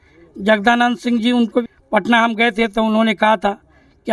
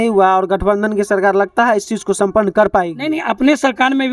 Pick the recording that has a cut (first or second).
first